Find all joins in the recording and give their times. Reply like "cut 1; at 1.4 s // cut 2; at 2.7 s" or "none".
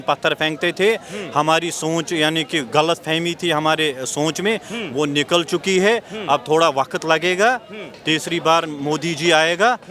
none

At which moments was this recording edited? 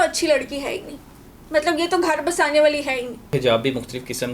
cut 1; at 3.3 s

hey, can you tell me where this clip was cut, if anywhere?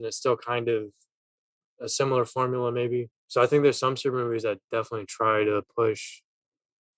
cut 1; at 3.2 s

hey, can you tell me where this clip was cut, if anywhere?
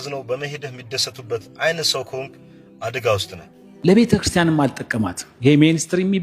cut 1; at 3.8 s

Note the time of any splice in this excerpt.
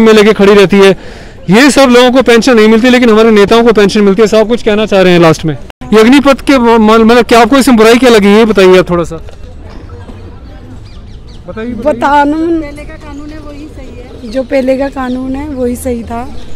cut 1; at 5.7 s

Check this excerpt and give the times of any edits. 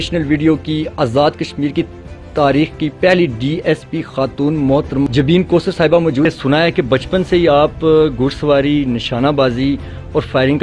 cut 1; at 5.1 s // cut 2; at 6.3 s

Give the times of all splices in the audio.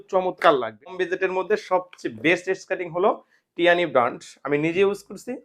cut 1; at 1.0 s

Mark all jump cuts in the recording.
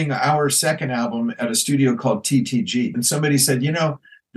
cut 1; at 3.0 s

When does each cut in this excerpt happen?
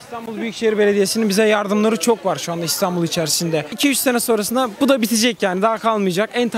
cut 1; at 3.7 s

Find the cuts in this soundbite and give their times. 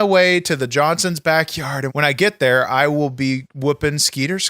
cut 1; at 1.8 s

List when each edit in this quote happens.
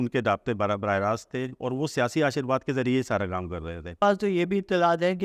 cut 1; at 4.0 s

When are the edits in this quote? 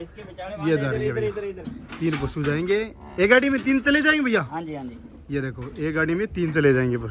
none

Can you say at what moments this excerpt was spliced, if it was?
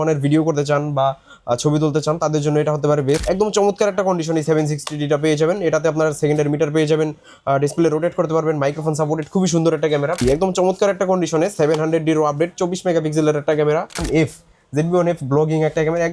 cut 1; at 3.2 s // cut 2; at 10.2 s // cut 3; at 14.0 s

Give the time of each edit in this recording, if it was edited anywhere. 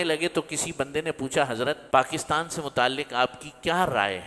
cut 1; at 1.8 s

